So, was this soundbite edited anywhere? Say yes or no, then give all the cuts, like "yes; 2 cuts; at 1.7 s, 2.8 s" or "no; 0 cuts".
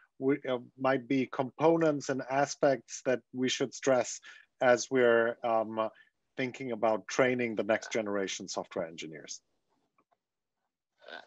no; 0 cuts